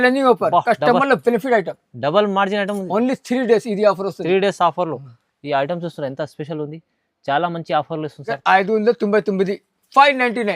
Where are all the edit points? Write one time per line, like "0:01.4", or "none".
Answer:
0:08.3